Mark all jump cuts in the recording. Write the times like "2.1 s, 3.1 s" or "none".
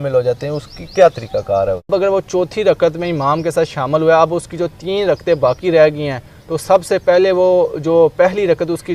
1.9 s